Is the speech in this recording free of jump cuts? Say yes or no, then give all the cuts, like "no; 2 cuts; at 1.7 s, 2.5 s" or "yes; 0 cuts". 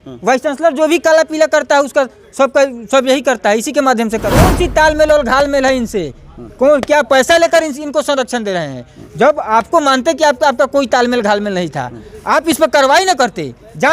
no; 1 cut; at 4.4 s